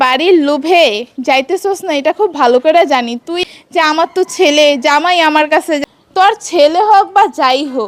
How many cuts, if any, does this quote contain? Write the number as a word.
two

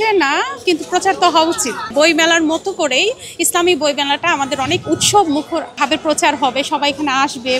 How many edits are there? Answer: two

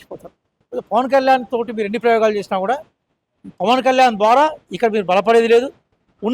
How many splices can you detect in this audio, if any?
zero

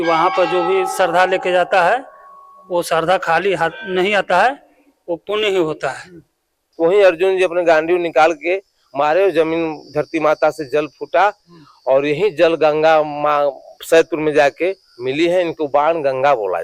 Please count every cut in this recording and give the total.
one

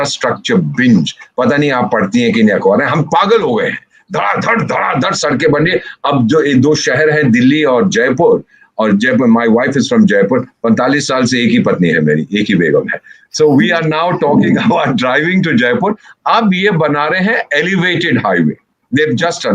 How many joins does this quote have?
zero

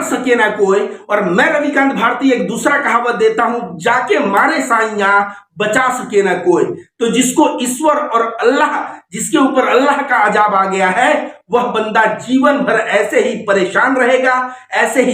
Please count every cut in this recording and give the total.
zero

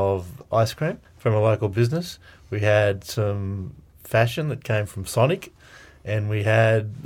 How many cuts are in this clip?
one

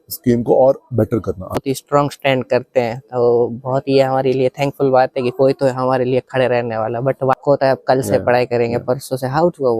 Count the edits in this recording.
two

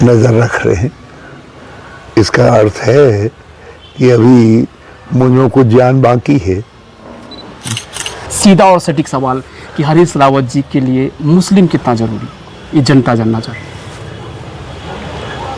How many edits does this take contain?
one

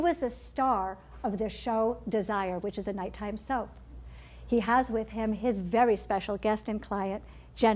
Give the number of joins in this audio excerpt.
one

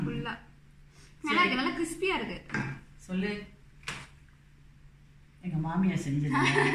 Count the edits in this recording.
one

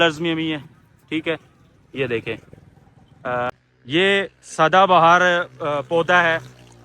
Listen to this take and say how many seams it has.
one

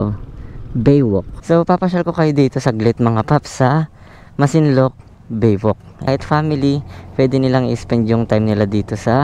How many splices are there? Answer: two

